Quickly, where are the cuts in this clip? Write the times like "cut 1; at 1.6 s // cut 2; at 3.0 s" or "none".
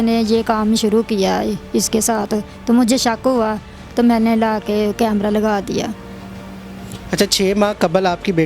none